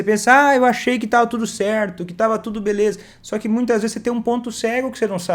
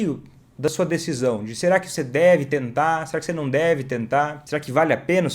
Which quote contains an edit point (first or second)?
second